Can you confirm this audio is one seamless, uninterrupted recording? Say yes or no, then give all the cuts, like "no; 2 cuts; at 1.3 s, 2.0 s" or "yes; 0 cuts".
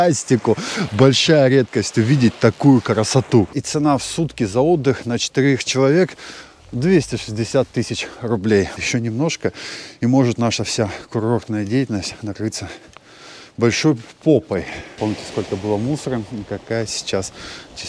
no; 3 cuts; at 3.6 s, 8.7 s, 14.8 s